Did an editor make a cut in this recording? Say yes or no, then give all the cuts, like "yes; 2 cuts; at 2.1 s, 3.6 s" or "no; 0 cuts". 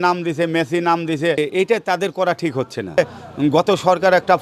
yes; 2 cuts; at 1.4 s, 3.0 s